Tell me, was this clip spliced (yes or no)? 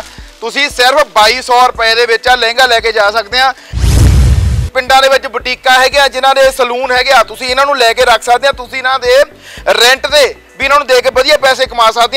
yes